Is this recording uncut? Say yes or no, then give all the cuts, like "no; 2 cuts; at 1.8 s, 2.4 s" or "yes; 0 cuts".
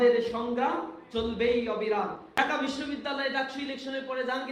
no; 1 cut; at 2.2 s